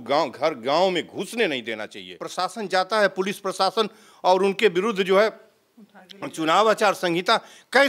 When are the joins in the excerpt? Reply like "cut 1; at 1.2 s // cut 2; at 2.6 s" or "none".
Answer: cut 1; at 2.3 s